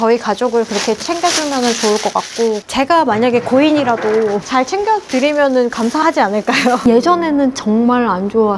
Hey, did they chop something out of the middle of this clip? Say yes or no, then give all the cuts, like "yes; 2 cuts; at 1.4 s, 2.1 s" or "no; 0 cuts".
yes; 1 cut; at 6.8 s